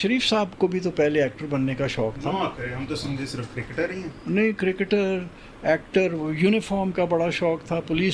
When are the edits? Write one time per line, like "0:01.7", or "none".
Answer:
none